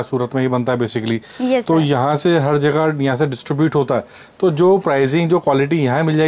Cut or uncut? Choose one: uncut